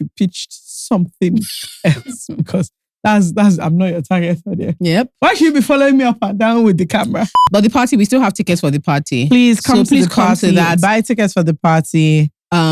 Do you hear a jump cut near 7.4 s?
yes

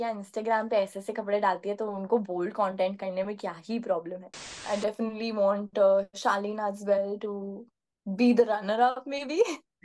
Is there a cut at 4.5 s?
yes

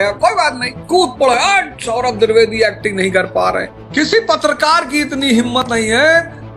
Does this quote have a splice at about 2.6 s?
no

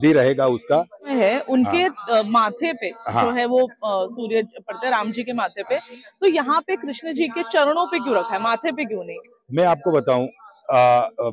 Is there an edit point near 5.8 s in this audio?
no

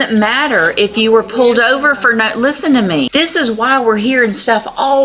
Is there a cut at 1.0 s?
no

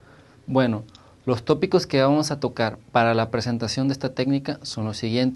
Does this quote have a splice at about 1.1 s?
yes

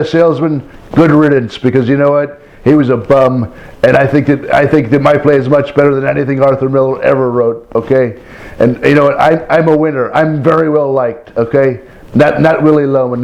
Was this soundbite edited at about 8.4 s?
yes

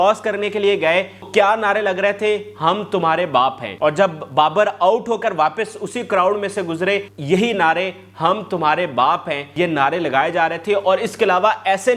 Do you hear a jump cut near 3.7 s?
yes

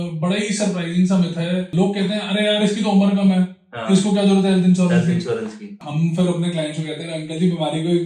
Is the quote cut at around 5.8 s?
yes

